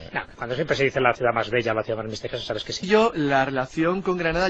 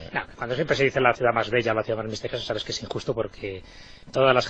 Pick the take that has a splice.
second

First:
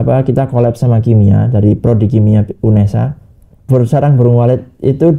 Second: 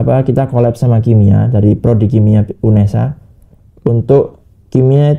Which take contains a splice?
first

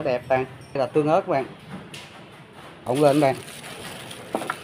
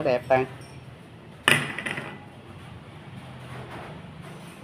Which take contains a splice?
first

